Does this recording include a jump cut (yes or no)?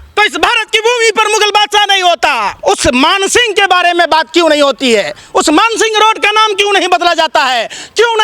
yes